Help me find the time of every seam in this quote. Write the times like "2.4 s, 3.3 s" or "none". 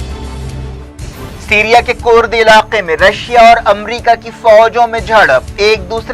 1.0 s